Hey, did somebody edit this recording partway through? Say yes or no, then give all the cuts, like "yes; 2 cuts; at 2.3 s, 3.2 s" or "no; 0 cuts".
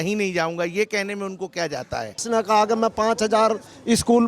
yes; 1 cut; at 2.2 s